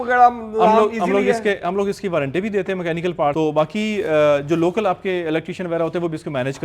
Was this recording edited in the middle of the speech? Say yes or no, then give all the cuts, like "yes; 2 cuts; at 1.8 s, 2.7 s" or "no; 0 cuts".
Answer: yes; 1 cut; at 3.3 s